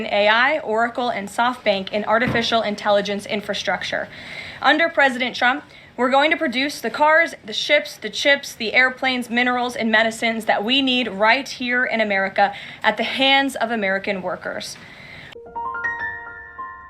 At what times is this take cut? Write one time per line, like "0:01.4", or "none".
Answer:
0:15.2